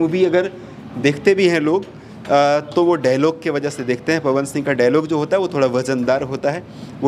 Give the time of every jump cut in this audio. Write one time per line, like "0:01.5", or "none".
none